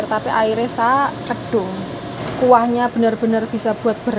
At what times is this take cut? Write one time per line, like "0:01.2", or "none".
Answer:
0:02.2